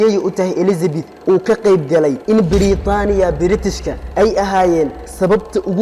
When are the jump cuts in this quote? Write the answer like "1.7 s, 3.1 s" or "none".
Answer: 2.2 s